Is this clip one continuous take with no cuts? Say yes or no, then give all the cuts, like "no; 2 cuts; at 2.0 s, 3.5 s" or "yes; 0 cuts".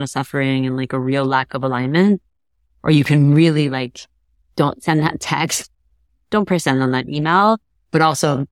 yes; 0 cuts